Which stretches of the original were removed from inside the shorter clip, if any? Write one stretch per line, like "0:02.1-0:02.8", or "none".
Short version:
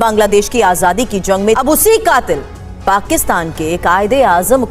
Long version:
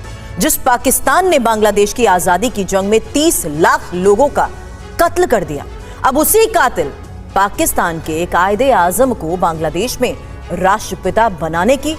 0:03.0-0:06.1